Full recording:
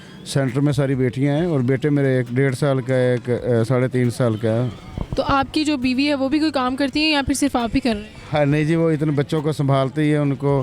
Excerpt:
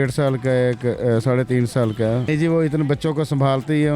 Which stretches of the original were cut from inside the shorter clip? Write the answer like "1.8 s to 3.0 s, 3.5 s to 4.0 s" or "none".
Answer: 4.7 s to 8.6 s